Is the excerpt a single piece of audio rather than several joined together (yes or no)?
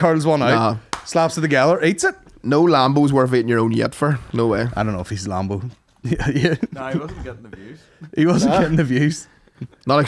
yes